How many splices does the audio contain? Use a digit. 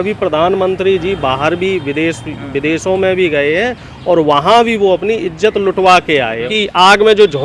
1